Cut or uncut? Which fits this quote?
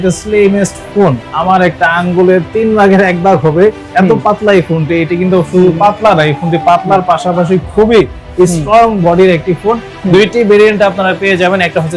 cut